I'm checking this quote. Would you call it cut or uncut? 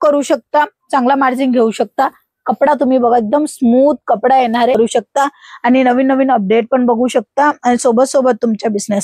cut